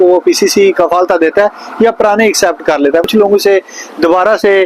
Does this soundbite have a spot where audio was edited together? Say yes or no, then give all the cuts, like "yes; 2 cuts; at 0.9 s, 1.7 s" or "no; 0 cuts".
yes; 1 cut; at 3.1 s